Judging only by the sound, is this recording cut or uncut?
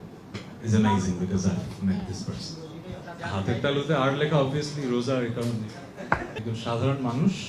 cut